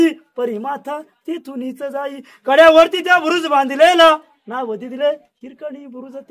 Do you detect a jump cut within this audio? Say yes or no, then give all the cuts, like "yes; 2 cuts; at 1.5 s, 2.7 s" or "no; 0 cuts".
no; 0 cuts